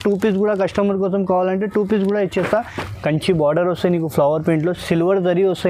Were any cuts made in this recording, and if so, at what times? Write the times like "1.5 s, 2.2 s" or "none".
2.8 s